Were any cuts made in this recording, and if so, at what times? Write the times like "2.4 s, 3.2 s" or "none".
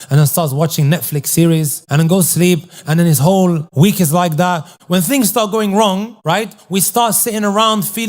1.8 s, 3.7 s, 4.7 s, 6.1 s

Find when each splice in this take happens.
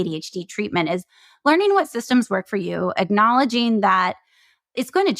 none

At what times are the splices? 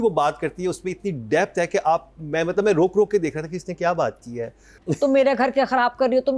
4.8 s

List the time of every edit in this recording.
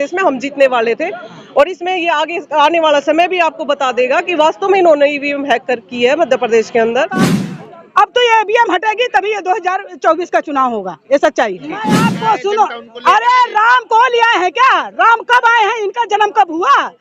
7.4 s, 12.1 s

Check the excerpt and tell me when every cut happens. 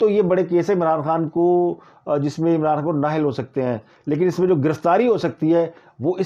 none

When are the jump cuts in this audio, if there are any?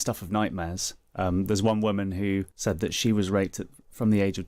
2.5 s

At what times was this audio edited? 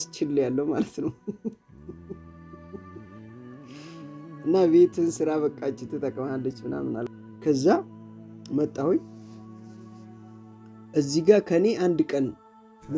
7.2 s

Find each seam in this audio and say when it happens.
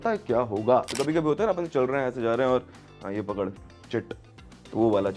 0.9 s

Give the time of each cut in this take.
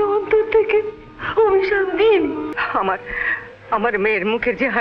2.4 s

